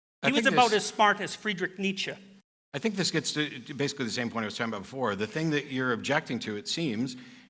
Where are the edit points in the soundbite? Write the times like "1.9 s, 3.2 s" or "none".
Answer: none

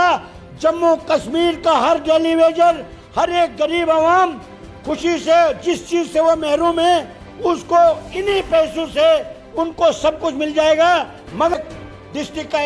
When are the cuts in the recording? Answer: 11.6 s

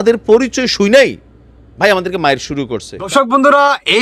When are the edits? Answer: 3.1 s

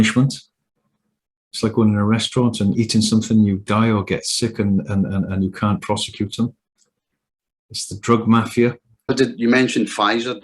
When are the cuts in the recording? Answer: 9.1 s

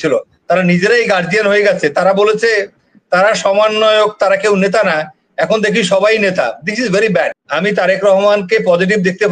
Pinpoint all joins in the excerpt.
7.4 s

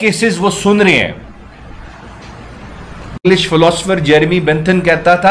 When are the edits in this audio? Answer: 3.2 s

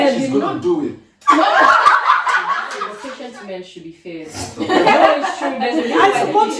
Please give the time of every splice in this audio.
3.0 s

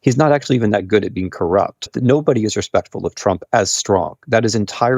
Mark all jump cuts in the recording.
1.9 s

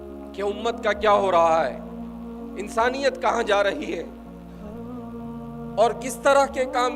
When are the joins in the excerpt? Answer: 4.1 s, 5.5 s

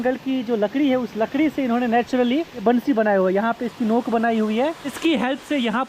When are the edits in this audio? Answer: 2.6 s, 4.9 s

